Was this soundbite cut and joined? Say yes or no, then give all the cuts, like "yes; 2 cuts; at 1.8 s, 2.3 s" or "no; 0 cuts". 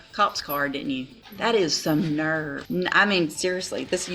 yes; 2 cuts; at 1.2 s, 2.6 s